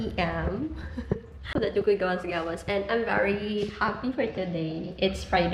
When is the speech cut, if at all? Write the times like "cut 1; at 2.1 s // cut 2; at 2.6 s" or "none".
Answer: none